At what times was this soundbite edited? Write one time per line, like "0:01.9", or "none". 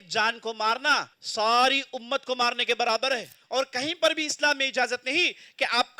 0:01.2
0:03.4